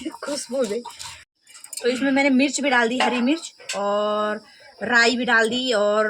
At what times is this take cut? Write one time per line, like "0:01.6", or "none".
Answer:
0:01.3